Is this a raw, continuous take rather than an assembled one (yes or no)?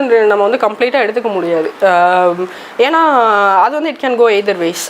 yes